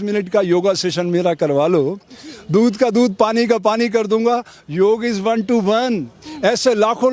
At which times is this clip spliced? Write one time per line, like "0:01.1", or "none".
none

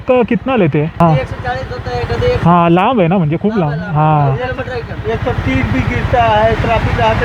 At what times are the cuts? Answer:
0:01.0

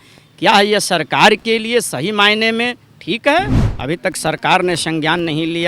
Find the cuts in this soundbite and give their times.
0:03.6

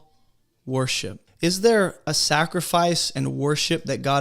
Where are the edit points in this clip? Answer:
0:01.2

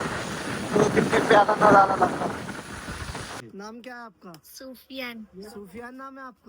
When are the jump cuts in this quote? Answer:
0:03.4

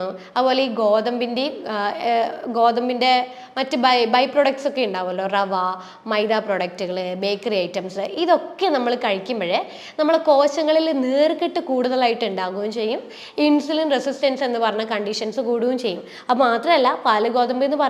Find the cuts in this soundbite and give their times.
none

